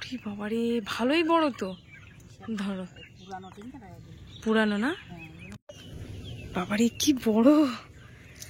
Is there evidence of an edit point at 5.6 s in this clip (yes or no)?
yes